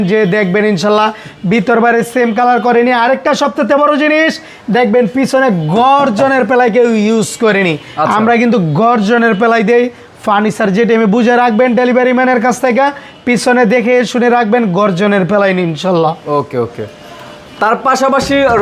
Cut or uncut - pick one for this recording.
uncut